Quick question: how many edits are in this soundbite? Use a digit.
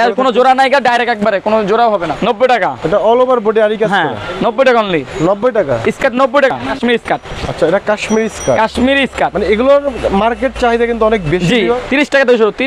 3